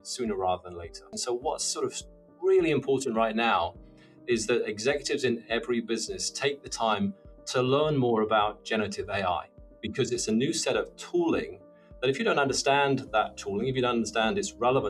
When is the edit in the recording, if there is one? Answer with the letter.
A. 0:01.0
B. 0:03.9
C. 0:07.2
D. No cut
A